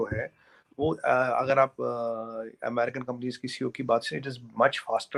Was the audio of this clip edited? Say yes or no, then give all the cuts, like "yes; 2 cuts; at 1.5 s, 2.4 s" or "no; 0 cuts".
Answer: no; 0 cuts